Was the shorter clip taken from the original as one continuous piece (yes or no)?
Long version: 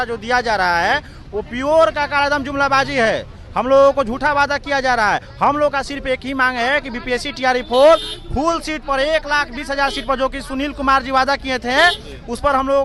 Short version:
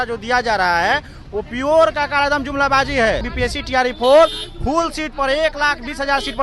no